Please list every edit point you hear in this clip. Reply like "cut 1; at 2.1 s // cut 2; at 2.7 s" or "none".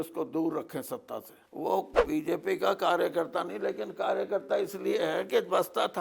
cut 1; at 1.4 s